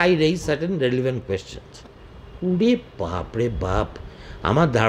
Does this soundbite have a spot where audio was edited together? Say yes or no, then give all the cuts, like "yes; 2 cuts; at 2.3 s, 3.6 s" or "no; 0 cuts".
no; 0 cuts